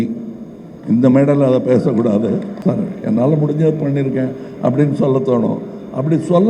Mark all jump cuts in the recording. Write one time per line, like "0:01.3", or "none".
0:02.5